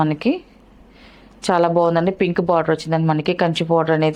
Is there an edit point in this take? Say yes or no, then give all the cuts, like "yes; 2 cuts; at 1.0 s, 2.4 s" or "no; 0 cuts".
no; 0 cuts